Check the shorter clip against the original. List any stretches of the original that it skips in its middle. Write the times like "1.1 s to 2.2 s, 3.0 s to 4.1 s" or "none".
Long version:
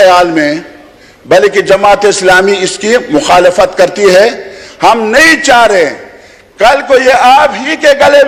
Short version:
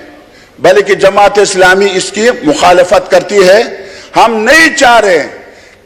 none